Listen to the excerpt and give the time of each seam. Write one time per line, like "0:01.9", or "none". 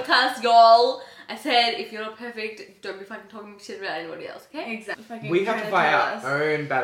0:05.0